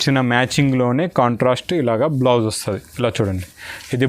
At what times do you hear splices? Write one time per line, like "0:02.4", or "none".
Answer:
none